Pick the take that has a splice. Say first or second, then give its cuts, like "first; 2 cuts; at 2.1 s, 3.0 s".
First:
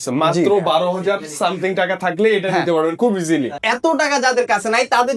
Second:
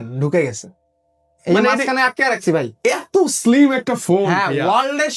first; 1 cut; at 3.6 s